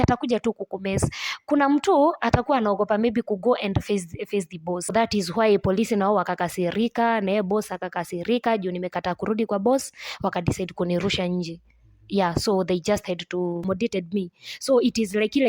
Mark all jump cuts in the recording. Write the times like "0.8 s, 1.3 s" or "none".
4.9 s, 13.6 s